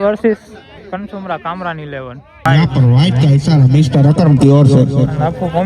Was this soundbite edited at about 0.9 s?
no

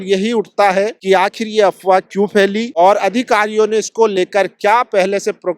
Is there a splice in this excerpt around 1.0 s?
yes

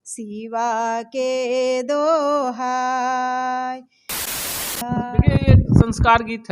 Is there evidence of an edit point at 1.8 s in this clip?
no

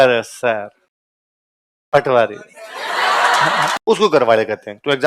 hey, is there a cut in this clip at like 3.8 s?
yes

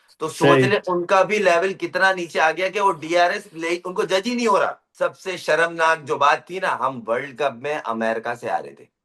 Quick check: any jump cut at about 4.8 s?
yes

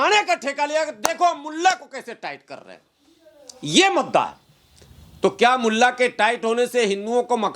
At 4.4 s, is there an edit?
no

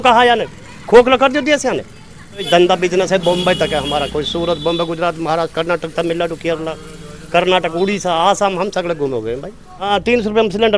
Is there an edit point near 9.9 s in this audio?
yes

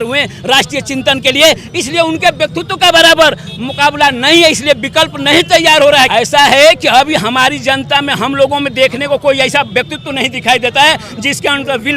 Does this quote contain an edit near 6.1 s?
yes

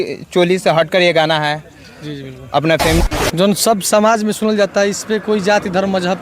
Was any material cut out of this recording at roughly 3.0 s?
yes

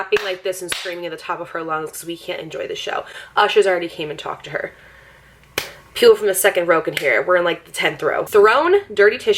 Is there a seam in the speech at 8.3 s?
yes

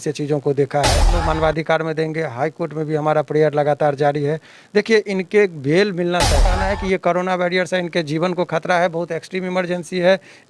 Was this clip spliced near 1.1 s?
yes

